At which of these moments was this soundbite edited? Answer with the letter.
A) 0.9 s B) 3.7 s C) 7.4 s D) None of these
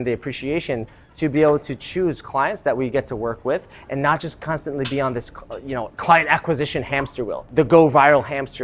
C